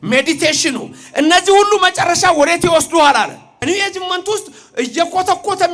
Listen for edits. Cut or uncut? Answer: cut